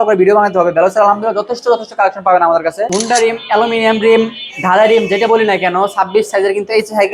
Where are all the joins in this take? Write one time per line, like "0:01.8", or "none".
0:02.9